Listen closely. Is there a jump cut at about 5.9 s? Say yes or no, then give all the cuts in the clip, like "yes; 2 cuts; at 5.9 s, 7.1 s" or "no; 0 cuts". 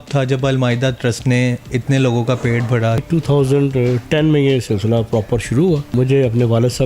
yes; 2 cuts; at 3.0 s, 5.9 s